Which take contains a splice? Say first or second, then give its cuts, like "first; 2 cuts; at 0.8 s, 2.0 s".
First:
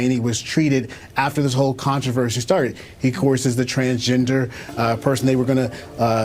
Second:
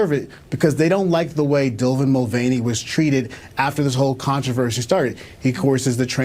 first; 1 cut; at 5.2 s